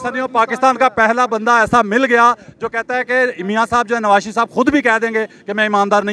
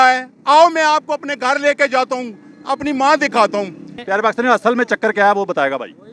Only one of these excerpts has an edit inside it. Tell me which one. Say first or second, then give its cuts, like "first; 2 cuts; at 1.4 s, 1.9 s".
second; 1 cut; at 3.9 s